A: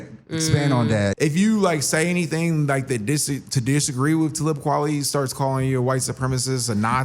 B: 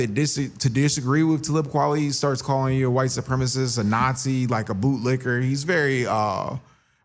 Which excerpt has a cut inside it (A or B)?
A